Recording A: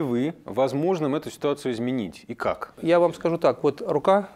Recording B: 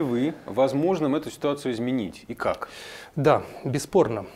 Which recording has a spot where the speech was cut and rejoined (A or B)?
A